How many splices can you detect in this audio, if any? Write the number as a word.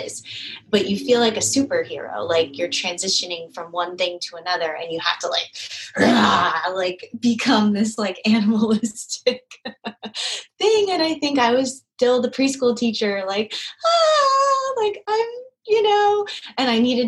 zero